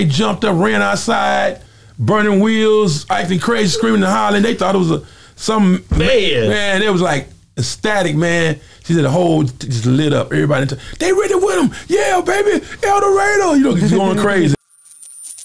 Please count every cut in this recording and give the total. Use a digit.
1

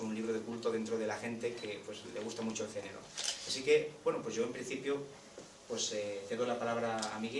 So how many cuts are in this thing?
1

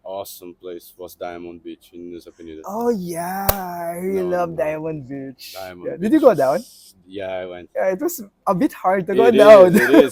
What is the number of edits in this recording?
0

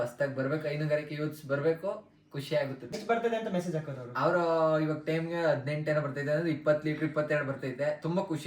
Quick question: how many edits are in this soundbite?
1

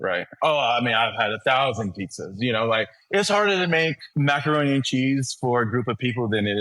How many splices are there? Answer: 1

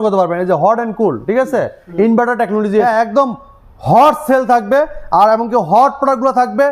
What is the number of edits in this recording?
1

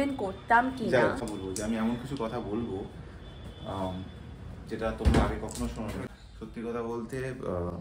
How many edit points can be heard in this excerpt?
2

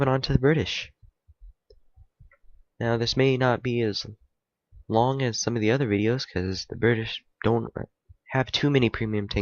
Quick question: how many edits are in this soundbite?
0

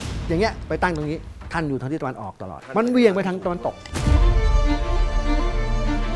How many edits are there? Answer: 2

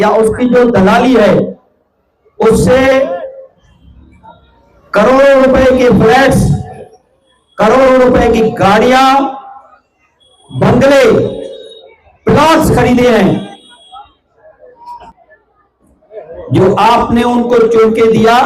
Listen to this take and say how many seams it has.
1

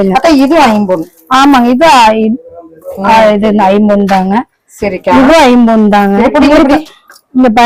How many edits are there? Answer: 0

